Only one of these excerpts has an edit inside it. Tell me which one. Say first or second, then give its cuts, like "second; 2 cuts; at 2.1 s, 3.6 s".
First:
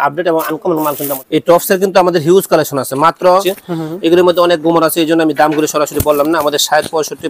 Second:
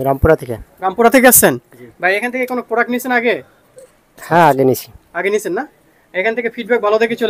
first; 2 cuts; at 1.2 s, 3.4 s